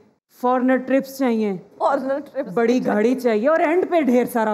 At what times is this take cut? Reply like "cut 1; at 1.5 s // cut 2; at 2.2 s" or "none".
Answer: cut 1; at 1.7 s